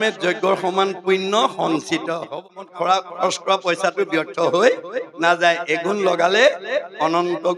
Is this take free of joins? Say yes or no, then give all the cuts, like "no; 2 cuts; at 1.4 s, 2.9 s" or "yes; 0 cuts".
no; 1 cut; at 2.3 s